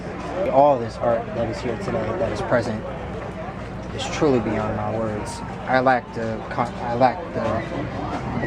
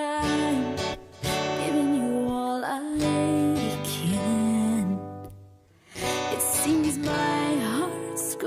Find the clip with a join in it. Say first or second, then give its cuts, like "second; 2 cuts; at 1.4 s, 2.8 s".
second; 1 cut; at 2.3 s